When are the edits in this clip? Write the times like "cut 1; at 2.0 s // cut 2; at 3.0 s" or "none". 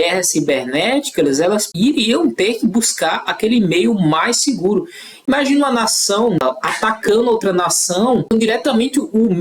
cut 1; at 1.7 s // cut 2; at 6.4 s // cut 3; at 8.3 s